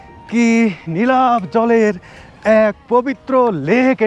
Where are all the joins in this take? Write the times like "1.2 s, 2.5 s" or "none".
none